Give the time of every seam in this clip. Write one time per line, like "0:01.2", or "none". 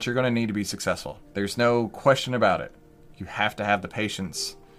0:01.2